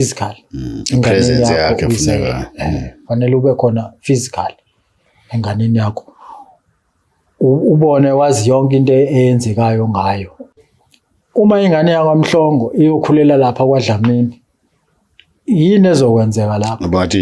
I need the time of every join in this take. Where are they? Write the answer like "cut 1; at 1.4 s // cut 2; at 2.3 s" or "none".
cut 1; at 10.6 s

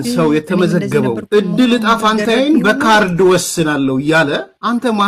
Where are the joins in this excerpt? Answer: cut 1; at 1.5 s

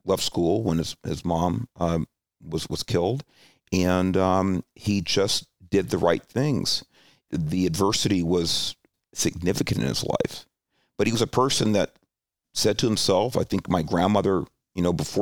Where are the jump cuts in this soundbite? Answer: cut 1; at 7.2 s // cut 2; at 8.9 s // cut 3; at 12.4 s

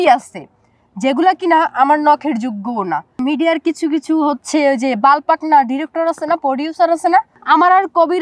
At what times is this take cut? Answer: cut 1; at 3.1 s // cut 2; at 7.3 s

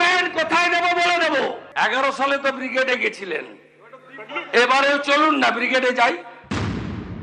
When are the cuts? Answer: cut 1; at 1.6 s // cut 2; at 6.3 s

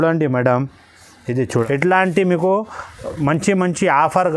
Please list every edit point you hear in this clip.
cut 1; at 1.7 s

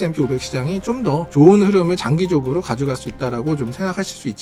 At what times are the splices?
none

